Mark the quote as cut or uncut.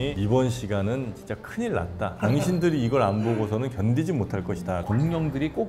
cut